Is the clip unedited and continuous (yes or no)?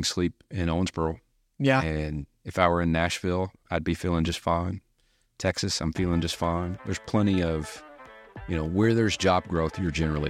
yes